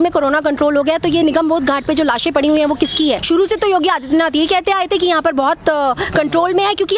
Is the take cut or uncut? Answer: cut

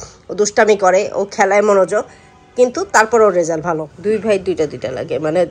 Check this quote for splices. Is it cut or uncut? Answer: cut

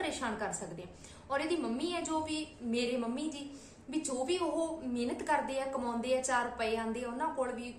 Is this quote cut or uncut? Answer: uncut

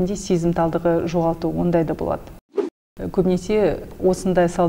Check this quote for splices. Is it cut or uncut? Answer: cut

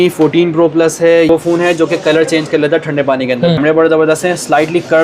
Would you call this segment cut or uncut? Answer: cut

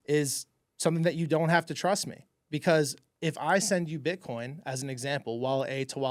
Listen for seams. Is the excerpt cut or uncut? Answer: uncut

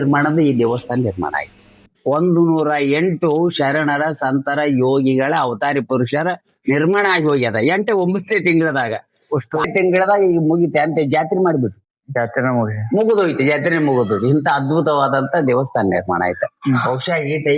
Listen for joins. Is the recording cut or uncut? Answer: cut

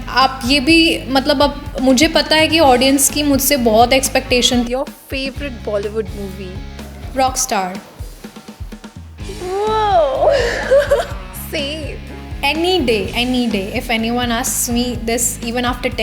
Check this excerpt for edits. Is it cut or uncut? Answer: cut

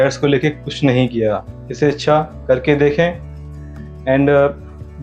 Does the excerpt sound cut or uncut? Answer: uncut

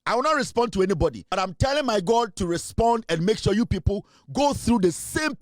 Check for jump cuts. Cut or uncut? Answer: cut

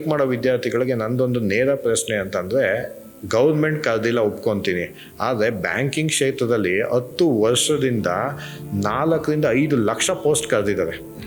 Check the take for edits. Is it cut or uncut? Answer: uncut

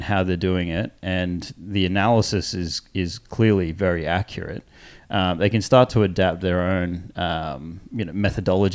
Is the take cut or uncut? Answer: uncut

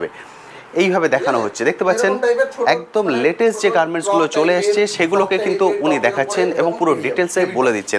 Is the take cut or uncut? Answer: uncut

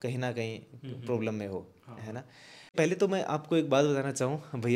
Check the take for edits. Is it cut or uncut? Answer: cut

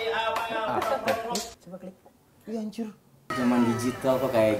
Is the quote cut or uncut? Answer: cut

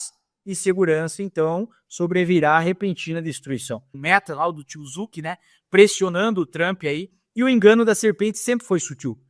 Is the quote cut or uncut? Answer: cut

